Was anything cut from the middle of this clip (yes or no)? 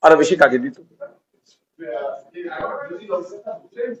no